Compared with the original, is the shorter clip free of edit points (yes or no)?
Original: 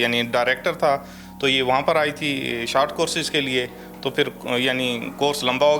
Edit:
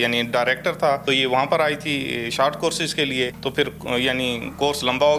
no